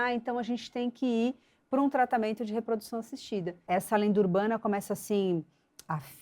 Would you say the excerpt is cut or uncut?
cut